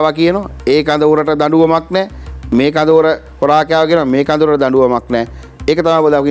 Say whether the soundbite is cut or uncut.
uncut